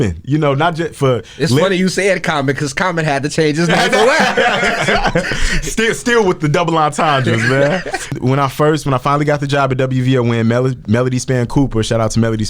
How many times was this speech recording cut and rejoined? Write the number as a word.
one